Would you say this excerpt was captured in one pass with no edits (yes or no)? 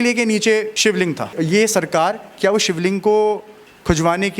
no